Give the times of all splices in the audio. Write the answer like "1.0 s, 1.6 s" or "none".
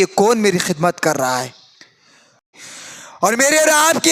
2.5 s

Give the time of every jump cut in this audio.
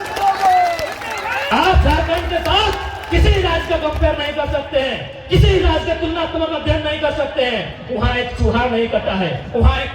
1.5 s

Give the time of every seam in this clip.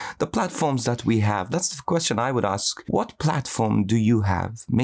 1.5 s, 2.7 s

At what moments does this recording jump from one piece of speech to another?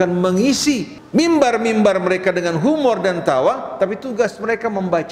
1.0 s

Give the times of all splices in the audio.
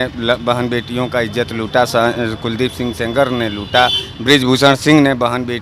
none

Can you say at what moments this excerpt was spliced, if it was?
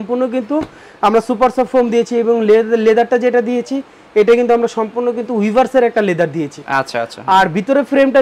none

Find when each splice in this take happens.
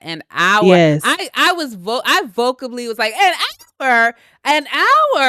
none

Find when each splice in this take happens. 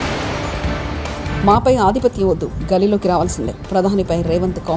1.3 s

